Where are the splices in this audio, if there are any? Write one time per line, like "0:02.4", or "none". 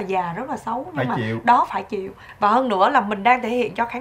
0:02.2